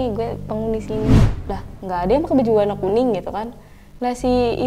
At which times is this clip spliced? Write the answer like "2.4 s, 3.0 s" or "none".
1.2 s